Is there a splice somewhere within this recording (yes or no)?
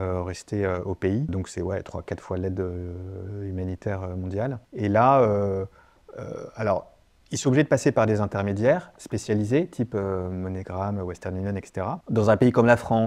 yes